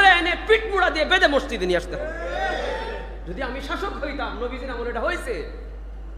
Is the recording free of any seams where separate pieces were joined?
yes; 0 cuts

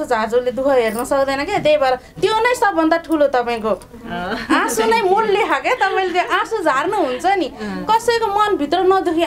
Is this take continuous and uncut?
yes; 0 cuts

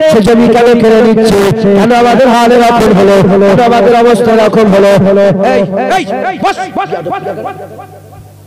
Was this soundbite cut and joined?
no; 0 cuts

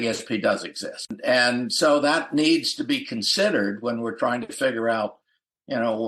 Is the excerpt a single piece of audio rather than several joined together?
no; 1 cut; at 1.1 s

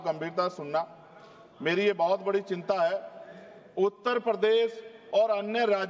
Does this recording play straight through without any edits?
yes; 0 cuts

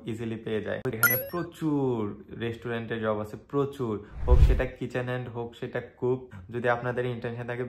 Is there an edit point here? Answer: yes; 2 cuts; at 0.9 s, 6.4 s

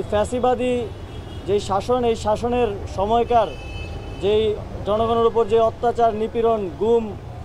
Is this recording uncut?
yes; 0 cuts

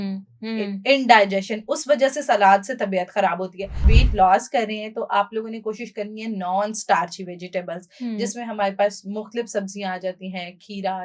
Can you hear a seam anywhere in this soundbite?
yes; 1 cut; at 3.9 s

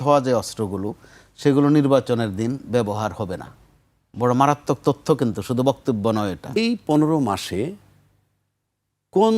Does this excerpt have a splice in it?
yes; 1 cut; at 6.6 s

